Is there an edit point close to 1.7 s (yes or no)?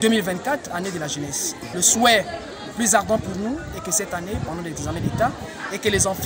yes